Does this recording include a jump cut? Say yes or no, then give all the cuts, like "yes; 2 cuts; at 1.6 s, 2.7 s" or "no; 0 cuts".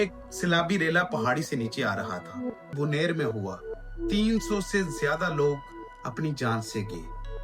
yes; 1 cut; at 2.7 s